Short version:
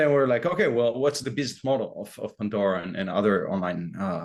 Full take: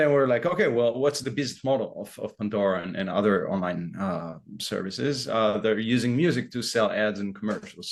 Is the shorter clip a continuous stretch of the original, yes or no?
yes